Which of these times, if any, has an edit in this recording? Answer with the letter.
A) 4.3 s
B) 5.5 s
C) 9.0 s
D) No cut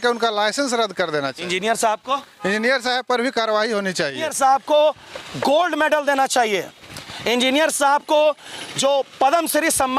A